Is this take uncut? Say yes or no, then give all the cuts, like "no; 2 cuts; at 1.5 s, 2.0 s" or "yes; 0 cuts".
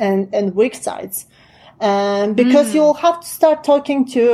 yes; 0 cuts